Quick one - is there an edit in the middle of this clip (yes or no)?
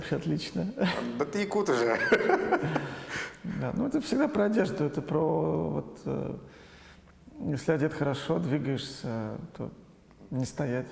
no